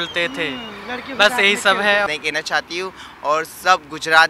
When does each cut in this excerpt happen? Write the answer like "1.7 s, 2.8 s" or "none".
2.1 s